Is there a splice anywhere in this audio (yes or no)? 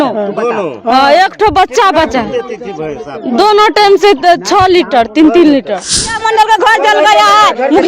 yes